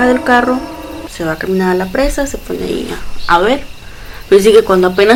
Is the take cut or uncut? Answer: uncut